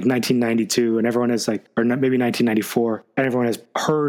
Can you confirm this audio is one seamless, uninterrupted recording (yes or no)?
yes